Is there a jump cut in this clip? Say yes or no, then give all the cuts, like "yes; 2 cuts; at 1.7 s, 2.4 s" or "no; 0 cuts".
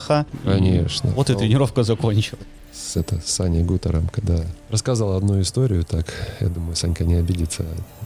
yes; 1 cut; at 2.3 s